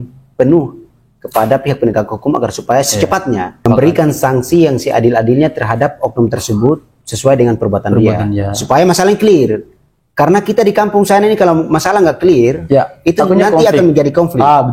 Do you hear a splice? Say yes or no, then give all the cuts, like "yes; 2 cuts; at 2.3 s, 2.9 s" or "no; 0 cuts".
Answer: yes; 1 cut; at 3.5 s